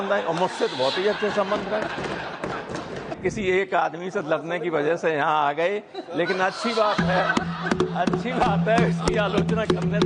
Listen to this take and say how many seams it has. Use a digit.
1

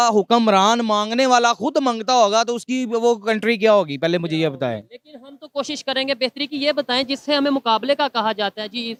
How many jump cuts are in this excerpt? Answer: 0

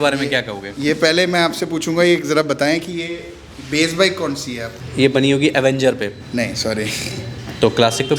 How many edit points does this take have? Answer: 2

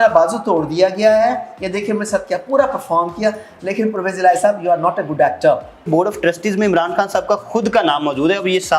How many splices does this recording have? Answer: 1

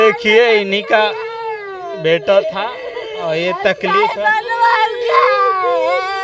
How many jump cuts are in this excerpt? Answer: 0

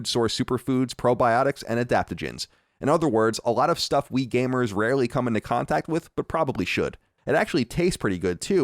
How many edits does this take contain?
1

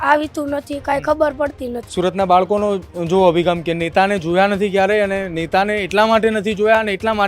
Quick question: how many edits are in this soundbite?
1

